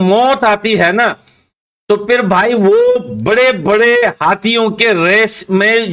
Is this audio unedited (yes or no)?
yes